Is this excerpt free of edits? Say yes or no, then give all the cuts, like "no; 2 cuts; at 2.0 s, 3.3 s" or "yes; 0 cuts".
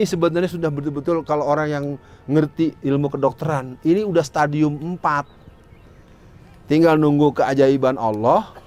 yes; 0 cuts